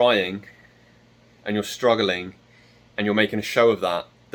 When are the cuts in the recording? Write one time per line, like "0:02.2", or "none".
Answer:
none